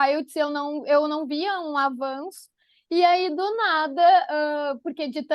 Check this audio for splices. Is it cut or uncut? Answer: uncut